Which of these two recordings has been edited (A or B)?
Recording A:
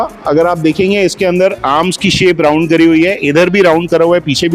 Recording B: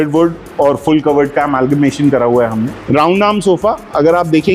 B